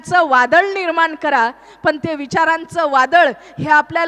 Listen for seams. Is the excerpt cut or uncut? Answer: uncut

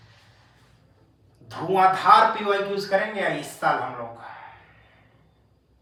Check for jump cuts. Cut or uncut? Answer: uncut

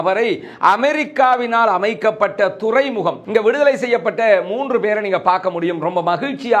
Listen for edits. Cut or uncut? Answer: cut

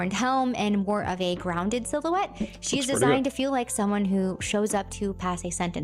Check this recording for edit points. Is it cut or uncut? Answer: uncut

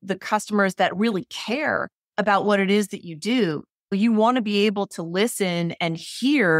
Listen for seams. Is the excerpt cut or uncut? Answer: cut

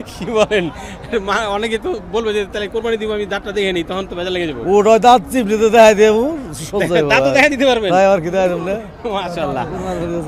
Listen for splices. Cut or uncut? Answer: uncut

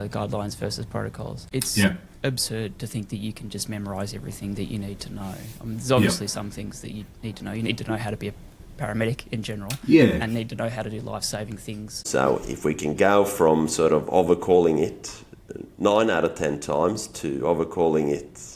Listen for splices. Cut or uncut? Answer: cut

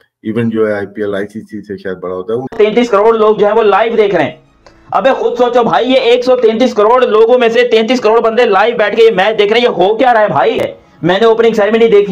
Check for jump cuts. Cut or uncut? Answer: cut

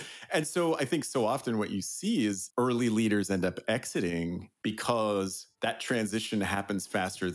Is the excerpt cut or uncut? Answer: cut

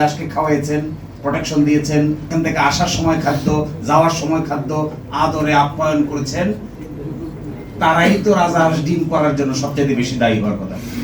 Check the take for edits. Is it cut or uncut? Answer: cut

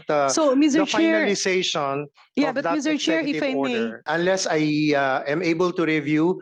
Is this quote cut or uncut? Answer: cut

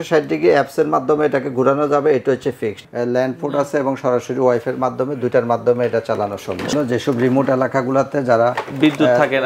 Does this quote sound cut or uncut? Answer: cut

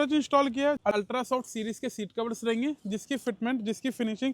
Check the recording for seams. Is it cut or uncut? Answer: cut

